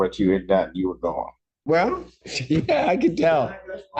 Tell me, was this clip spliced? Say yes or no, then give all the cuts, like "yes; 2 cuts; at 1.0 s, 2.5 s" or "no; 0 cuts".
yes; 1 cut; at 1.5 s